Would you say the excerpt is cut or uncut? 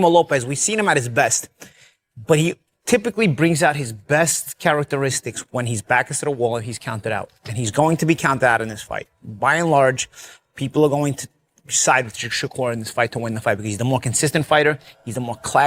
uncut